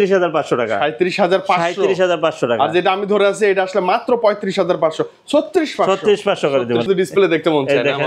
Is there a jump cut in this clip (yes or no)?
yes